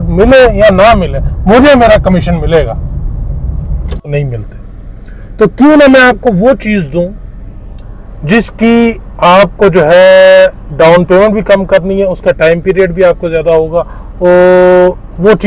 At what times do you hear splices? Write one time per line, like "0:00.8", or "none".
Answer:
0:04.1